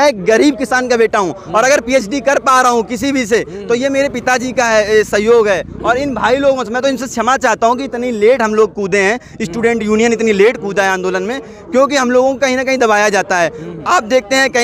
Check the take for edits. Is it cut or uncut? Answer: uncut